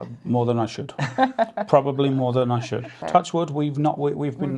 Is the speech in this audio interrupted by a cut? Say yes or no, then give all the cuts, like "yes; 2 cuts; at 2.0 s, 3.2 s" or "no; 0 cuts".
yes; 1 cut; at 3.0 s